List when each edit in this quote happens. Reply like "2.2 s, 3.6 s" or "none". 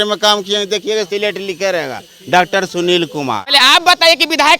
3.4 s